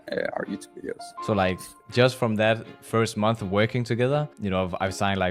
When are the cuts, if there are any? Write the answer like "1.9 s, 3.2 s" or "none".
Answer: 1.1 s, 2.7 s, 4.3 s